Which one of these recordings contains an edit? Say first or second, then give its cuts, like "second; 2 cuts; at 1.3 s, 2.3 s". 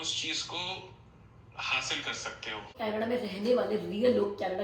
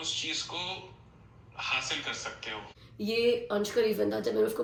first; 1 cut; at 2.8 s